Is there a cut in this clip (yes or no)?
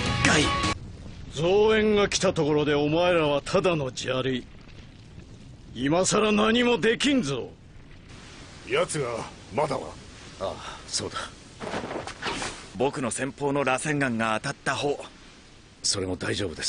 yes